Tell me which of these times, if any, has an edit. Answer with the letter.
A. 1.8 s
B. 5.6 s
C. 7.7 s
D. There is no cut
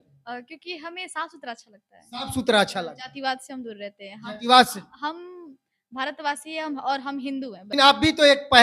C